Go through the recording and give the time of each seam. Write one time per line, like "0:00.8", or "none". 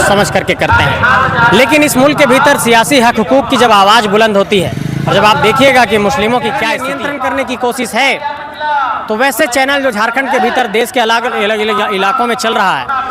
0:06.8